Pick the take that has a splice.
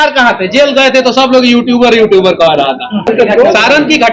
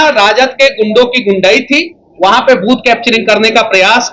first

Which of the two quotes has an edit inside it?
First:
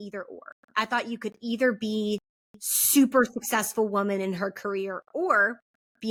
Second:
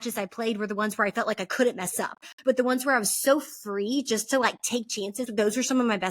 second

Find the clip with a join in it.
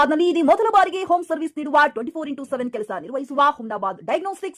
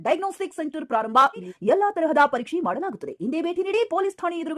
second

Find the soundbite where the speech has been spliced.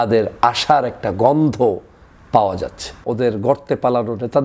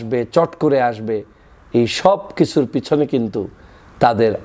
first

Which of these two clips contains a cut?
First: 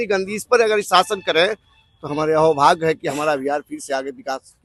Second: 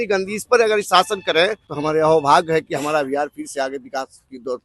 second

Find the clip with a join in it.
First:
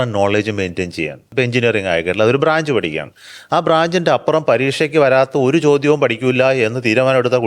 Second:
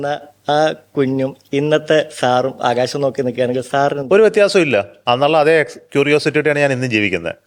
first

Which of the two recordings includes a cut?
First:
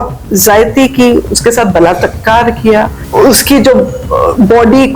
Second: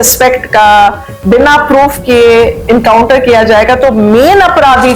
first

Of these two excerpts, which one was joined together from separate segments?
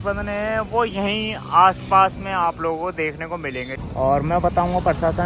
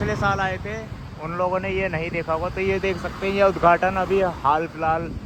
first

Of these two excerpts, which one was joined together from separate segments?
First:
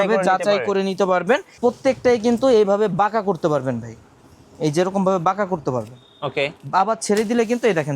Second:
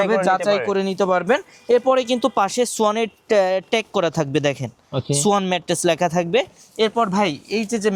first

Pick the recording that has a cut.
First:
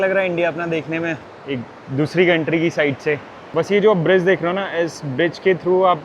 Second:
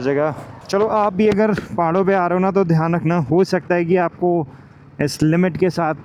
first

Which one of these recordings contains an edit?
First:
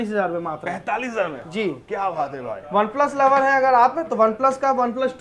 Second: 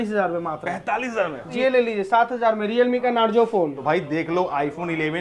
second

